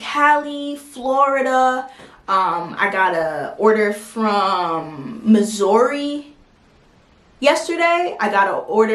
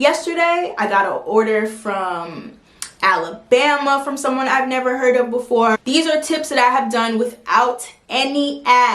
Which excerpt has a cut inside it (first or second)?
second